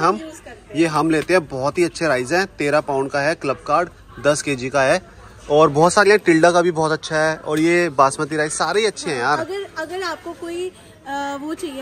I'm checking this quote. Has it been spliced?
no; 0 cuts

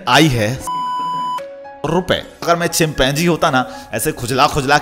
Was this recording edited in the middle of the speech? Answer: yes; 1 cut; at 2.4 s

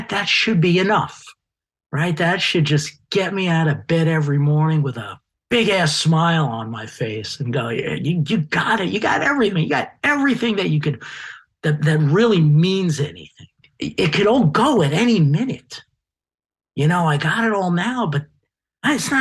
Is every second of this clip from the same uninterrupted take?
yes; 0 cuts

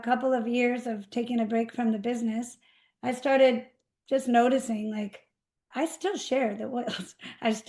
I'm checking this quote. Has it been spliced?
no; 0 cuts

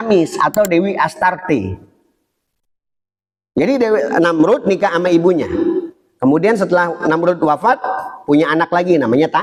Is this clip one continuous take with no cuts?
yes; 0 cuts

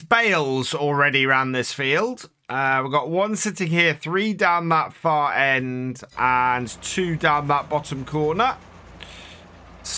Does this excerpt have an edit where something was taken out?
no; 0 cuts

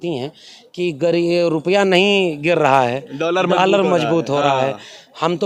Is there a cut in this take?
no; 0 cuts

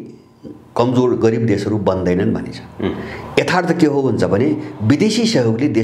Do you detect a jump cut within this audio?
no; 0 cuts

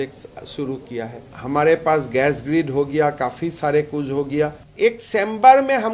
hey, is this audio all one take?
no; 2 cuts; at 1.3 s, 4.6 s

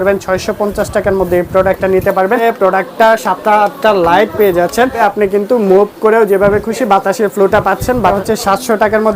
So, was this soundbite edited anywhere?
yes; 3 cuts; at 2.4 s, 5.0 s, 8.2 s

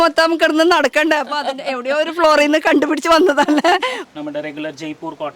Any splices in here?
yes; 1 cut; at 4.0 s

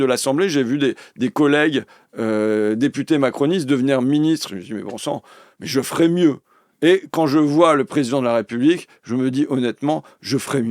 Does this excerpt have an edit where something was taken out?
no; 0 cuts

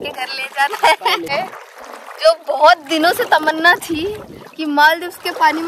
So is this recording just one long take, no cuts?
no; 1 cut; at 1.3 s

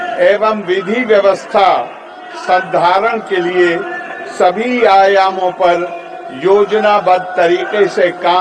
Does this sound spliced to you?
no; 0 cuts

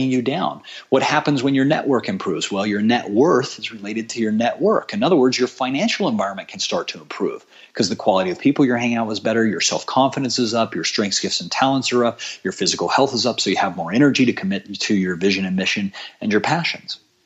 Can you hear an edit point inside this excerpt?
no; 0 cuts

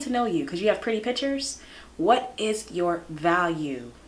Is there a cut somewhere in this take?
no; 0 cuts

